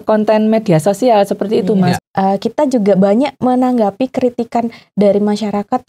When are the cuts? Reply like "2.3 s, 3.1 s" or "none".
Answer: 2.0 s